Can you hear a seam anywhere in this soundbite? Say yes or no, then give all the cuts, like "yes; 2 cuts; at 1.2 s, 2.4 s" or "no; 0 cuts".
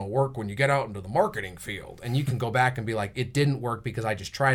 no; 0 cuts